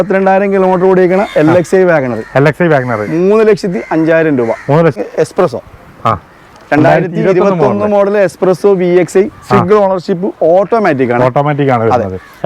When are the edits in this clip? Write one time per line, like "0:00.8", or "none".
0:05.0